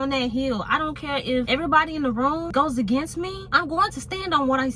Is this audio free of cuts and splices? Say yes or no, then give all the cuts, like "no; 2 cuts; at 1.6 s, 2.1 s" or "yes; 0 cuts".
no; 3 cuts; at 1.5 s, 2.5 s, 3.4 s